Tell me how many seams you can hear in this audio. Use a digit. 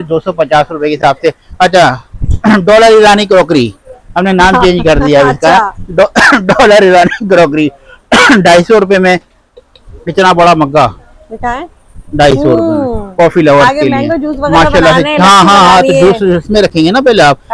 0